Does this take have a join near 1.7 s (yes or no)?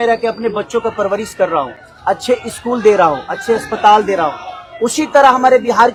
no